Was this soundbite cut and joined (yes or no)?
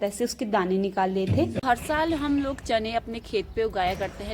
yes